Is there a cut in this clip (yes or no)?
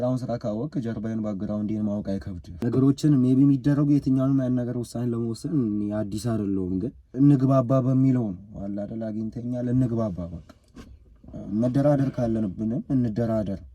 yes